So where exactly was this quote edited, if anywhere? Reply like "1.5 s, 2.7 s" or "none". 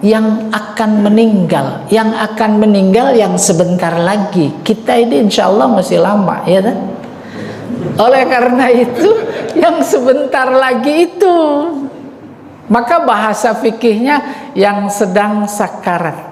none